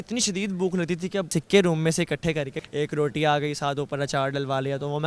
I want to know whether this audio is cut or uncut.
cut